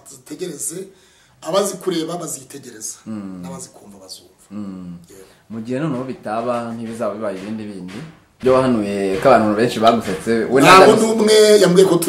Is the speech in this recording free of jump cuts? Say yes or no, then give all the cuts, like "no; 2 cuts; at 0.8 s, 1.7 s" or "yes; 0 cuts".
no; 1 cut; at 8.3 s